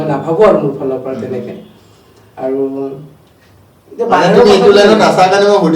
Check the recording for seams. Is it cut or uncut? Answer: uncut